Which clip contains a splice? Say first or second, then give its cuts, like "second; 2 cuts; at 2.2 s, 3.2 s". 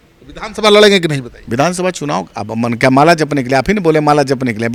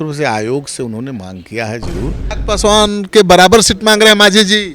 second; 1 cut; at 2.3 s